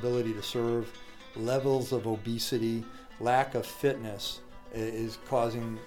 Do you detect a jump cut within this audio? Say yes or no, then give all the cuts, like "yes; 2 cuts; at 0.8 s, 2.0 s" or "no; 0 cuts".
no; 0 cuts